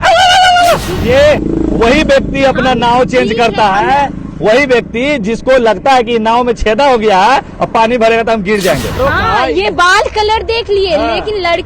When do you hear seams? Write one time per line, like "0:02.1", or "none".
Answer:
0:00.9
0:08.9